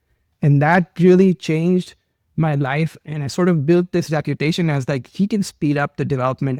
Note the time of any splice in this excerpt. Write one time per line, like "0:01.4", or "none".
none